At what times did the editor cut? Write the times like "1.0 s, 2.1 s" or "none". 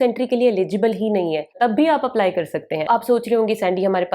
1.5 s, 2.9 s